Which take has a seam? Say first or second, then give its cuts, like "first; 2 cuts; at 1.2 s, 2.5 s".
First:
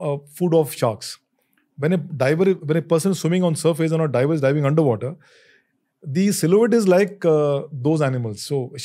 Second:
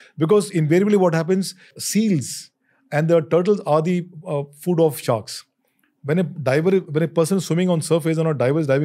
second; 1 cut; at 1.8 s